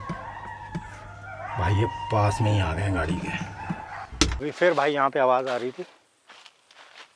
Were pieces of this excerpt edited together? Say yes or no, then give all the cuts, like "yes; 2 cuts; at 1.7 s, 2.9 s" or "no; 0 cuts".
yes; 1 cut; at 4.3 s